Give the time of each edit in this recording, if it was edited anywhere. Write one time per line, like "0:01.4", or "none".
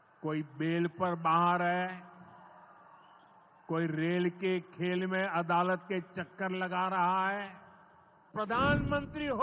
0:08.3

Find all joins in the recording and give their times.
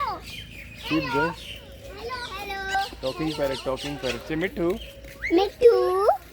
0:02.7

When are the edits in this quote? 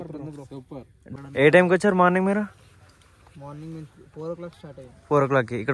0:01.1

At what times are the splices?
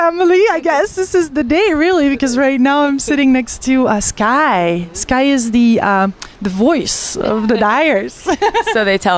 0:04.6

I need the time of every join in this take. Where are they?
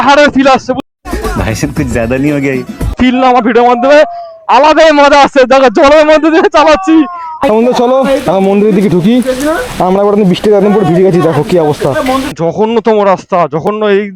0:00.8
0:02.9
0:07.3
0:12.3

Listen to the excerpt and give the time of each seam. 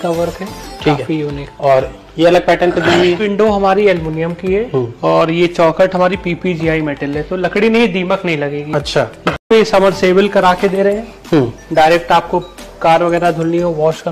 0:09.4

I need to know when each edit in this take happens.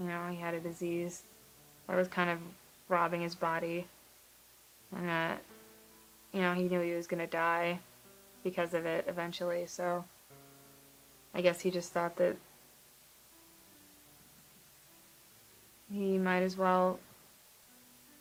none

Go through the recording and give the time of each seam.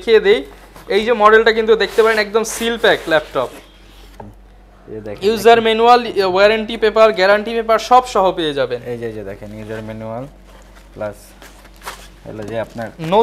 none

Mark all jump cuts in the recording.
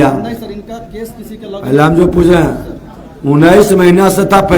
none

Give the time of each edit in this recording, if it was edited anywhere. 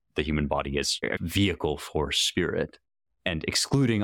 0:01.1

